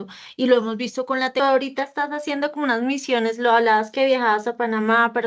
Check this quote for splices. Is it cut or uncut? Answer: cut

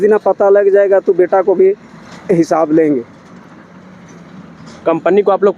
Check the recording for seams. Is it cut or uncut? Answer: uncut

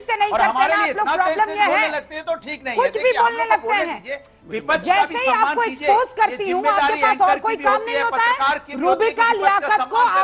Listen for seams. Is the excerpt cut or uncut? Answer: uncut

